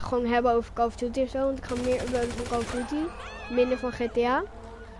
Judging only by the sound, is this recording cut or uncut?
cut